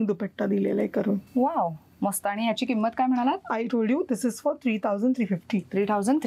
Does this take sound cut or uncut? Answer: uncut